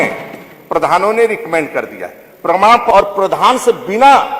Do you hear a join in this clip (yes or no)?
yes